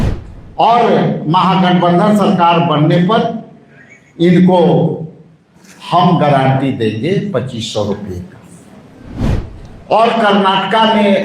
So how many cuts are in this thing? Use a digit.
1